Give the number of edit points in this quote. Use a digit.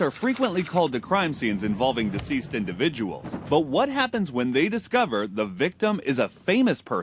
0